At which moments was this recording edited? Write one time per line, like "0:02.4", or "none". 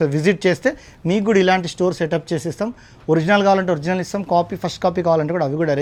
none